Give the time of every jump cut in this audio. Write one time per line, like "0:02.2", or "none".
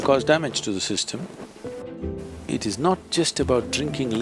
0:01.8